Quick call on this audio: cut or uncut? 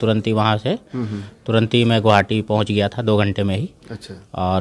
uncut